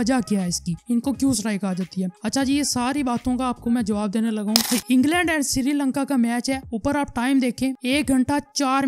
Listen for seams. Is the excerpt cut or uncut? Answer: cut